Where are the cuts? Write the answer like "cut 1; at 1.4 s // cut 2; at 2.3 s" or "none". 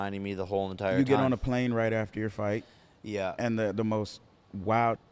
none